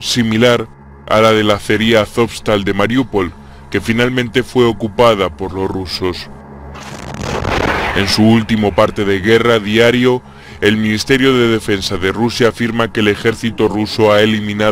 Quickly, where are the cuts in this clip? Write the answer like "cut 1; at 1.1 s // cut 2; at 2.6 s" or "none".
none